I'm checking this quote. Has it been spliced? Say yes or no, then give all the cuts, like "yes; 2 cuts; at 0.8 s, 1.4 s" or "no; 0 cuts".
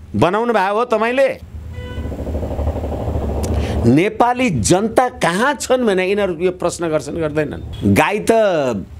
yes; 2 cuts; at 1.4 s, 7.6 s